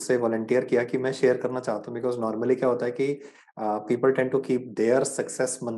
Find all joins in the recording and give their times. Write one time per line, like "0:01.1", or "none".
none